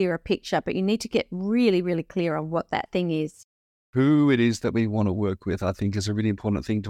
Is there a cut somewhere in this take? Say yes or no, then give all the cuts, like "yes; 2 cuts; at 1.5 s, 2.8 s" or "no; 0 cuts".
yes; 1 cut; at 3.8 s